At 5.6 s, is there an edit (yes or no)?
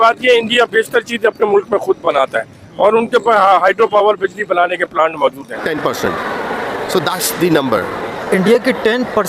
yes